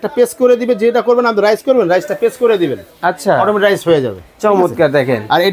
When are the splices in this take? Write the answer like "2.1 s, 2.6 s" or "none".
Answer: none